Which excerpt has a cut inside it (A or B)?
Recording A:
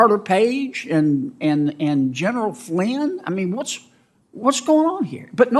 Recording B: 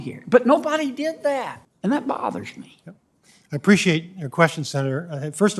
B